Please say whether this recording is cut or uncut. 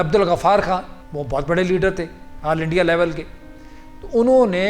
cut